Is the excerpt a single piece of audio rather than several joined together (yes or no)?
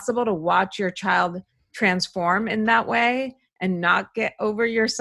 yes